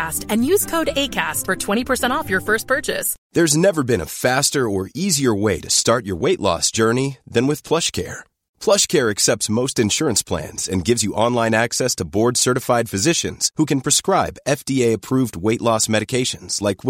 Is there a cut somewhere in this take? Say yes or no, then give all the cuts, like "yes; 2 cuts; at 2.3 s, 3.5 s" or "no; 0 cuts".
yes; 1 cut; at 3.1 s